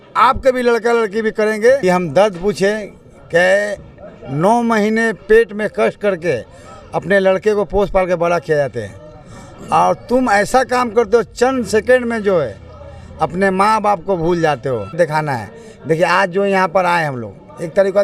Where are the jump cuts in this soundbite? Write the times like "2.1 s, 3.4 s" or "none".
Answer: 1.8 s, 15.0 s